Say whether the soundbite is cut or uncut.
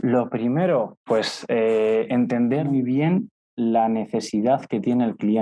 cut